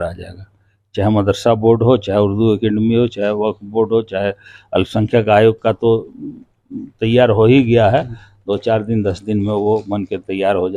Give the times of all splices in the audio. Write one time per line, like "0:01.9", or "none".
none